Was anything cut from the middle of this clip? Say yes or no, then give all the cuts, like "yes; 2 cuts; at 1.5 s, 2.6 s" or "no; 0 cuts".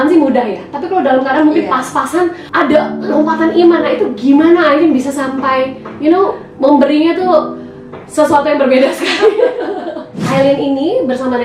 yes; 2 cuts; at 2.4 s, 10.1 s